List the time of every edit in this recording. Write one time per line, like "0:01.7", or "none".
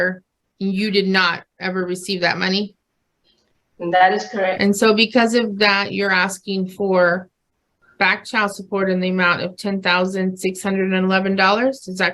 0:04.6